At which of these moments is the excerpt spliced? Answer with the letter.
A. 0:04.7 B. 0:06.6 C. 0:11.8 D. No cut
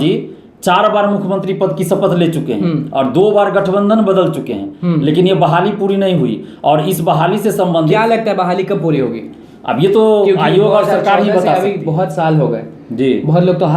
D